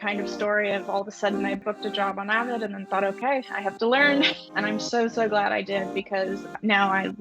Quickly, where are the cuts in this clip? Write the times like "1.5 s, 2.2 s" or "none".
1.6 s, 4.4 s

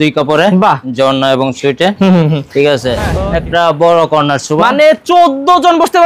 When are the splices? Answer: 3.1 s

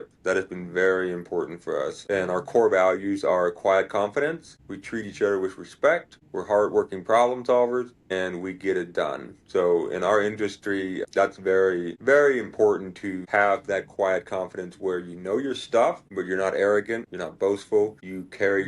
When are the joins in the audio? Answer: 8.0 s

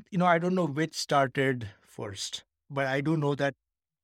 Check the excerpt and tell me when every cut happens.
2.7 s

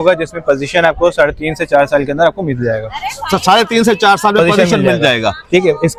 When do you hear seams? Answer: none

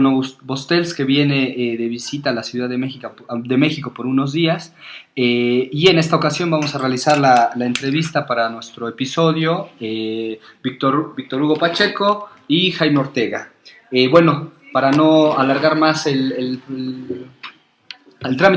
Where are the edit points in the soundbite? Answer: none

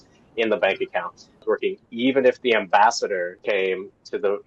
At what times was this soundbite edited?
1.3 s, 3.4 s

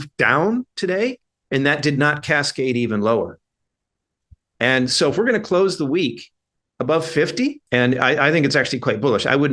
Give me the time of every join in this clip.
7.6 s

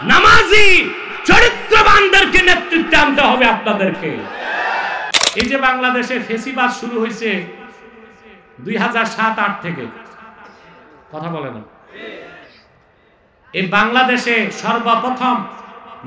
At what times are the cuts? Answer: 5.2 s

